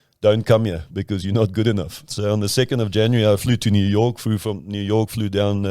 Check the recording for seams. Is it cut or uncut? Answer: cut